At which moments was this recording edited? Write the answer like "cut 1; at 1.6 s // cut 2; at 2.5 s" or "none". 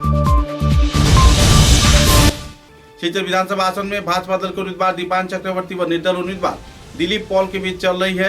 cut 1; at 2.4 s